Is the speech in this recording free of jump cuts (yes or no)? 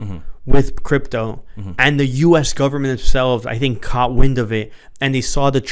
yes